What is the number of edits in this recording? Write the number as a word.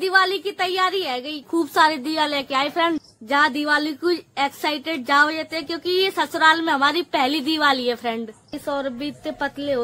three